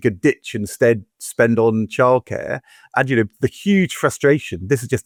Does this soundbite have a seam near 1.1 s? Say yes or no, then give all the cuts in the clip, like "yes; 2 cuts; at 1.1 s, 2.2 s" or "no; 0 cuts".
no; 0 cuts